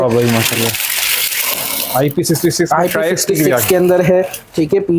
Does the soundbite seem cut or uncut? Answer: uncut